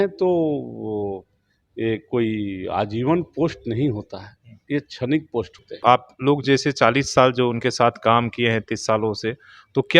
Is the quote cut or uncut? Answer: cut